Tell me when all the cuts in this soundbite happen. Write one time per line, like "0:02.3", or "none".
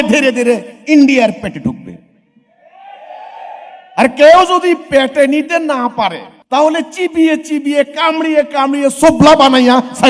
0:06.3